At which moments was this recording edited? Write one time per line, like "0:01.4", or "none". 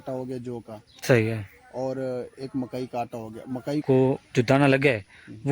0:03.8